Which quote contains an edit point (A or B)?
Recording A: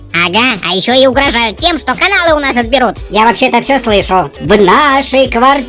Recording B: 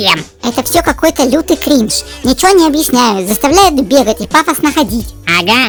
A